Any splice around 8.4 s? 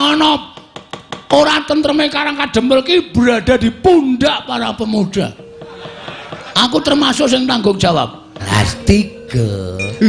yes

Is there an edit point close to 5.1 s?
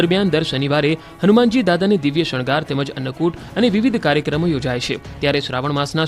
yes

